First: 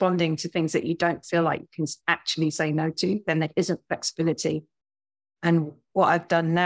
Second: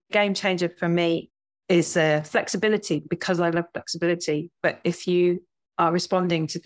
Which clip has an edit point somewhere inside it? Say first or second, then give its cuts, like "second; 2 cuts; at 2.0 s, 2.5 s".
second; 2 cuts; at 1.3 s, 3.1 s